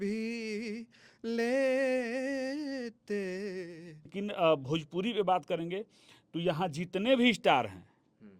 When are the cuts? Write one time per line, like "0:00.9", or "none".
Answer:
0:04.1